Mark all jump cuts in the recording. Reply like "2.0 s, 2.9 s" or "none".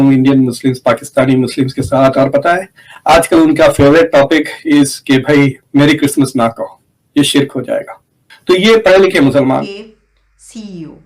8.2 s, 9.6 s